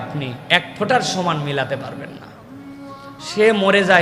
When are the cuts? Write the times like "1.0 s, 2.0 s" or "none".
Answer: none